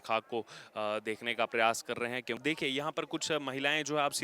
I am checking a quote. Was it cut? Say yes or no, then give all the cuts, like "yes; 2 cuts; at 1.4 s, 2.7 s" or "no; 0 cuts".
yes; 1 cut; at 2.4 s